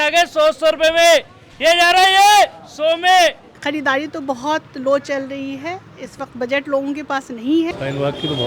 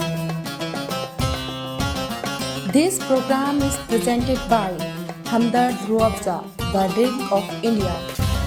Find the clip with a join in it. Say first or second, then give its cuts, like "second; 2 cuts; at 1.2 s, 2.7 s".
first; 2 cuts; at 3.5 s, 7.7 s